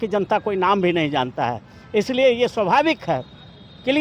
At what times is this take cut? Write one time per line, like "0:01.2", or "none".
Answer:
none